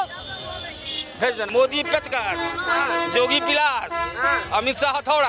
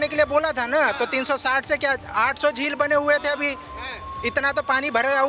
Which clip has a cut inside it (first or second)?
first